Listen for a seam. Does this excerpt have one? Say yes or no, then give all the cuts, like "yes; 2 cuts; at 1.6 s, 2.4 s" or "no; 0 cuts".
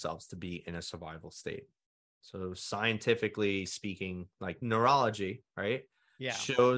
yes; 1 cut; at 4.6 s